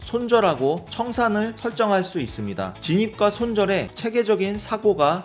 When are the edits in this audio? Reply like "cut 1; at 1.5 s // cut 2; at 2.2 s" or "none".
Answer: none